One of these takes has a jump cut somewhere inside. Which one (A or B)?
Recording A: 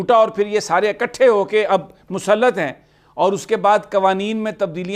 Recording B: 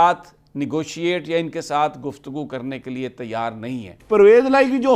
B